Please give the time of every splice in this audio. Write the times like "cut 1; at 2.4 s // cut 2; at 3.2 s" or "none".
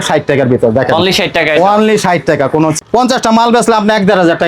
cut 1; at 2.8 s